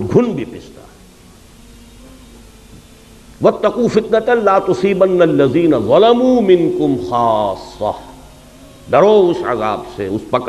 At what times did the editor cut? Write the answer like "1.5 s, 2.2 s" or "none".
none

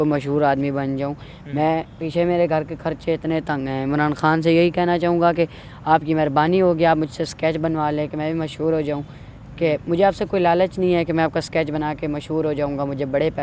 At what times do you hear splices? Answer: none

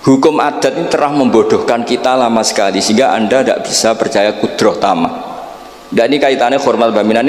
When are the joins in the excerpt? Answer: none

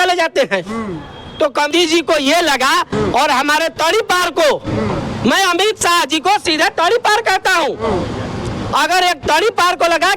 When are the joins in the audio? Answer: 1.7 s

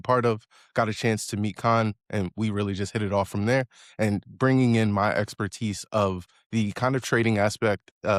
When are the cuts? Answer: none

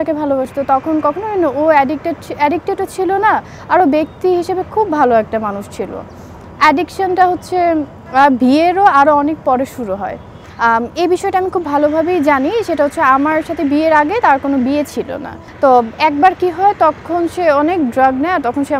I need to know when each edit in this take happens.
10.4 s, 15.4 s

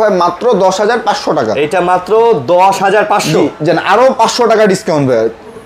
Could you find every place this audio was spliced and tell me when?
none

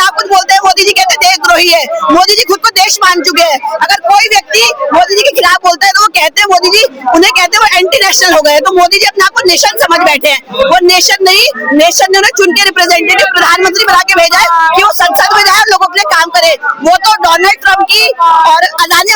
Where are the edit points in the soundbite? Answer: none

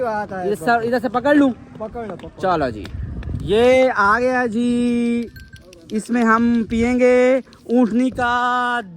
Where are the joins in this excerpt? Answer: none

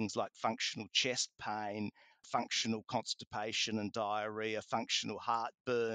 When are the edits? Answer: none

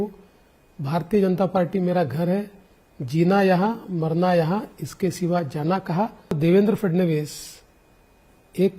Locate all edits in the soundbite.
6.4 s

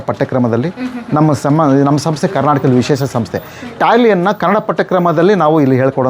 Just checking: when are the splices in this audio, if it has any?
none

